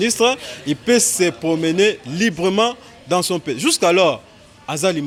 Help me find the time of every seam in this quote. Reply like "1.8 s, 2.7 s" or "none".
none

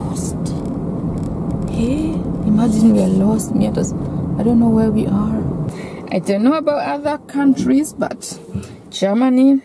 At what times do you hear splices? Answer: 5.7 s

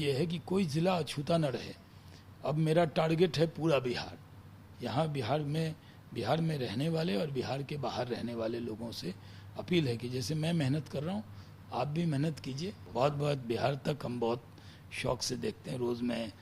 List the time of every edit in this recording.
12.8 s

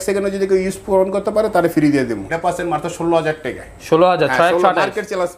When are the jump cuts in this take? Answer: 2.2 s

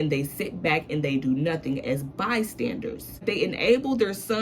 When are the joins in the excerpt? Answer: 3.2 s

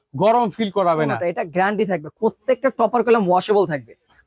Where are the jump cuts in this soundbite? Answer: 2.1 s

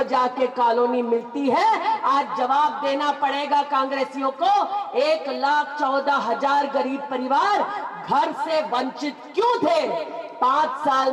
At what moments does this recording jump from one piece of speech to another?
none

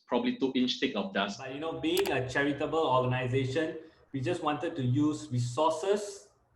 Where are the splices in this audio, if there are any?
1.6 s

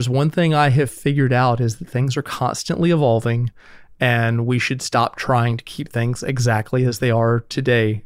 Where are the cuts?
none

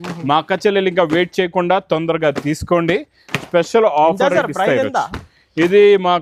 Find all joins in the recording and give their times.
none

